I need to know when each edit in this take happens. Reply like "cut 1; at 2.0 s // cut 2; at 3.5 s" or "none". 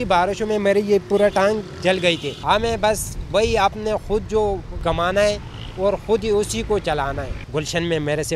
cut 1; at 2.3 s // cut 2; at 4.7 s // cut 3; at 7.3 s